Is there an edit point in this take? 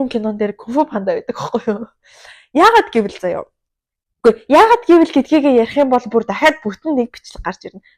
no; 0 cuts

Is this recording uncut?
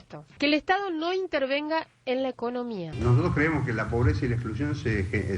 no; 1 cut; at 2.9 s

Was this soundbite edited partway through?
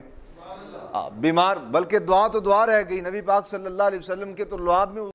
no; 0 cuts

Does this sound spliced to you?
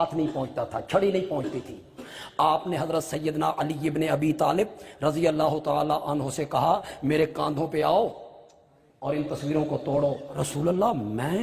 yes; 1 cut; at 10.4 s

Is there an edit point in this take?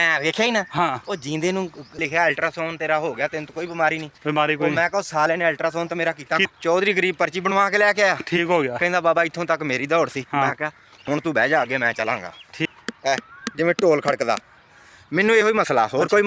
yes; 3 cuts; at 2.0 s, 6.5 s, 12.7 s

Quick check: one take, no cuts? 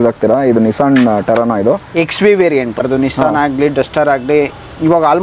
no; 1 cut; at 2.8 s

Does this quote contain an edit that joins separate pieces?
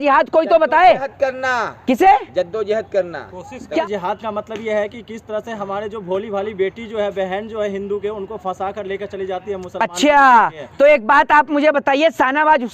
yes; 1 cut; at 3.8 s

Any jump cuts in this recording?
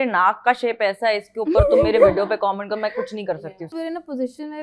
yes; 1 cut; at 3.7 s

